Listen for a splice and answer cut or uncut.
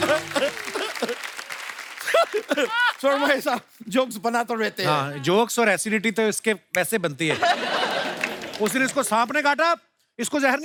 uncut